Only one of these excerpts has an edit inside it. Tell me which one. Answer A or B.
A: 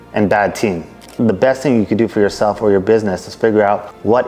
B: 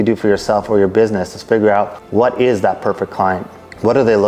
A